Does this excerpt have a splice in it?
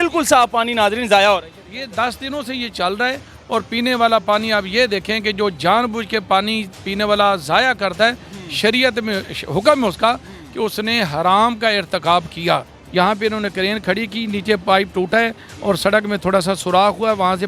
yes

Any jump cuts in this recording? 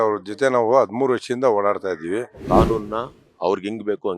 yes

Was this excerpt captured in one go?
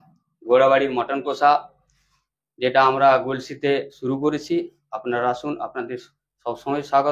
yes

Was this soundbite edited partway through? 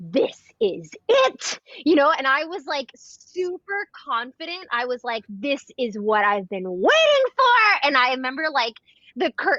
no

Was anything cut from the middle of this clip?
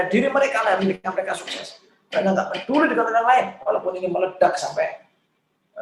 no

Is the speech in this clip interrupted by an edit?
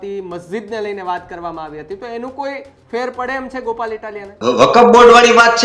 yes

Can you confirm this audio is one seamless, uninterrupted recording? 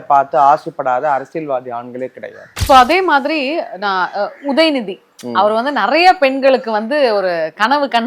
no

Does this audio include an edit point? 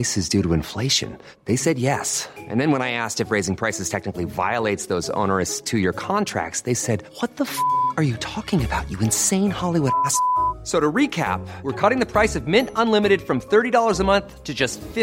no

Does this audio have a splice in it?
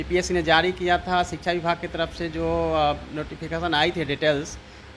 no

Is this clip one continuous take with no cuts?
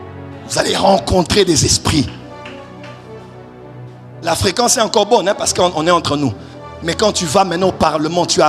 yes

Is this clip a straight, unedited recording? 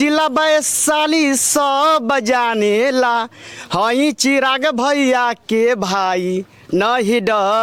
yes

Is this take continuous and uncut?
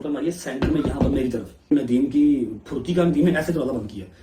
no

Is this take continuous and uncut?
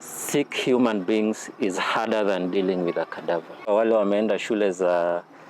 no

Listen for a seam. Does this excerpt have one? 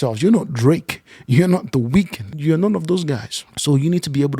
yes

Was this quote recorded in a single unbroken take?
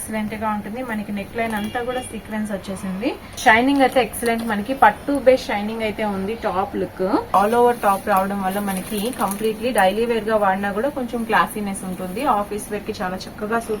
no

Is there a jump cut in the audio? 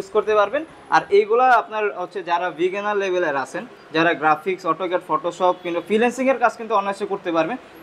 no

